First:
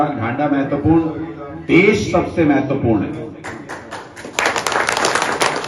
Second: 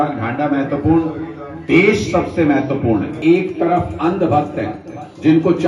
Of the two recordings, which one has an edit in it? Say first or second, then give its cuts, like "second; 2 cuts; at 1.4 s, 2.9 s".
second; 1 cut; at 3.2 s